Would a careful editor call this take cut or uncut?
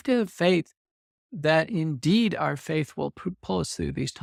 uncut